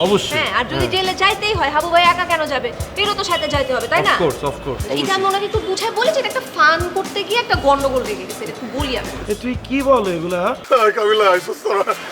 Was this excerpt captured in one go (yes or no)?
no